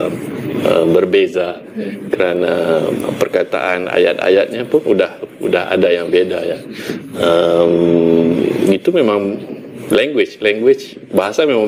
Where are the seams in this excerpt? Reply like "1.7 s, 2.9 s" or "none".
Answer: none